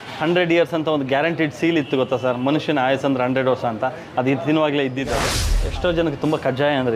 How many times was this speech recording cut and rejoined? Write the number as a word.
one